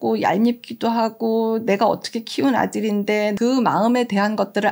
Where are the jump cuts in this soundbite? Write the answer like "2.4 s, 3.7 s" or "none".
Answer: 3.3 s